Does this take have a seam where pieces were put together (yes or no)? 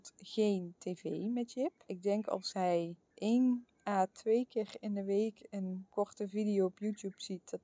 yes